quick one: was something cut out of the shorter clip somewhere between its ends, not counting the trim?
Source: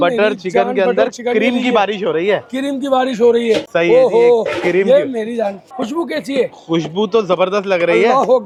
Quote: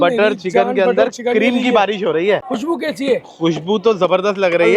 yes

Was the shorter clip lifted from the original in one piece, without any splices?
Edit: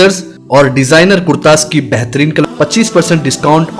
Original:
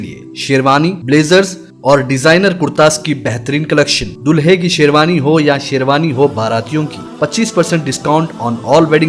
no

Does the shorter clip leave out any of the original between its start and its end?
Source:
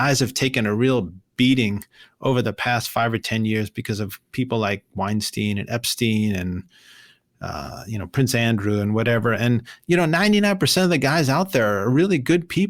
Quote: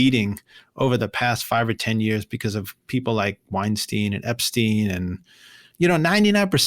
yes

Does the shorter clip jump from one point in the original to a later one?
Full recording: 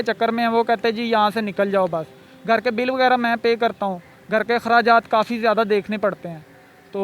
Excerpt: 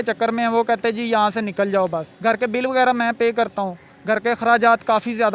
yes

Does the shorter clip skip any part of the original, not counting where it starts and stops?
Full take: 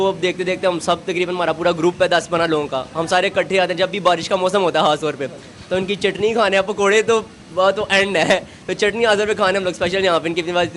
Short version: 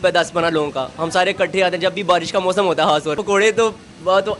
yes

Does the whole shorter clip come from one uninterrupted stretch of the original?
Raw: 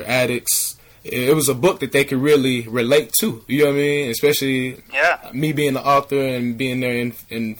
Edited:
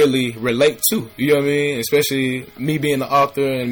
no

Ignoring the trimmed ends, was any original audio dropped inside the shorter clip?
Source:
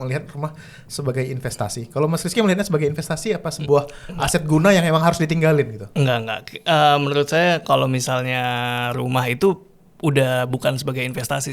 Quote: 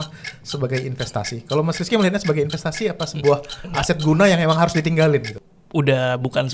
yes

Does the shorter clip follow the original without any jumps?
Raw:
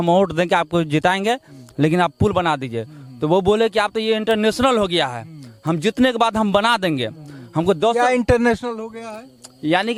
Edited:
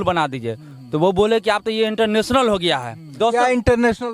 no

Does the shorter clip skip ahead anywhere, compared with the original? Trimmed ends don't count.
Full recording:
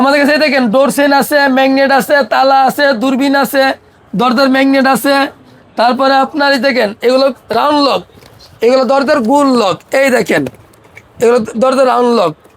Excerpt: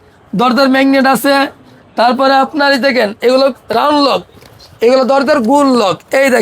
no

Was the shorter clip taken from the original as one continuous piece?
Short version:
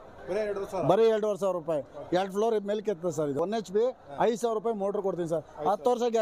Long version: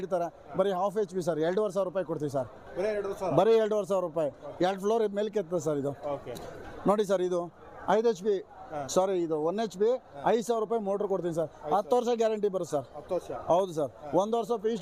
no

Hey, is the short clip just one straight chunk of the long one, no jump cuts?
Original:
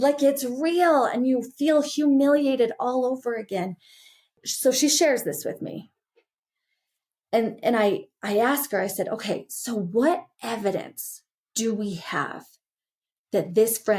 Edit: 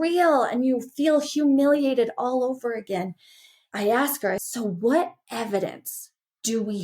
no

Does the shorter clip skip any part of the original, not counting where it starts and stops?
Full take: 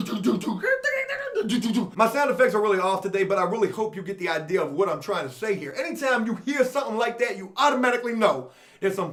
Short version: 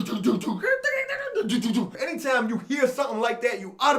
yes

